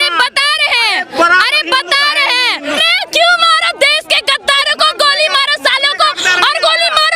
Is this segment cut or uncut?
cut